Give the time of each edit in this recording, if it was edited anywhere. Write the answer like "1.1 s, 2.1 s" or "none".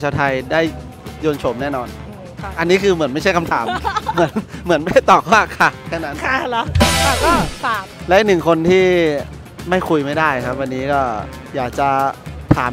7.9 s